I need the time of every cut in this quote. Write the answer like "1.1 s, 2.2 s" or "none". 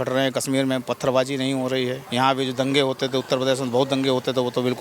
2.0 s